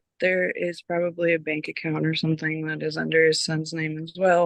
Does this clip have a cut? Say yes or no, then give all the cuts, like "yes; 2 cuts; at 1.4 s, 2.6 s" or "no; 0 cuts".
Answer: no; 0 cuts